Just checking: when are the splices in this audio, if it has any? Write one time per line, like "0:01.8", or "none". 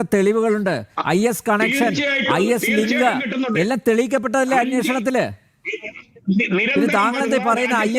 none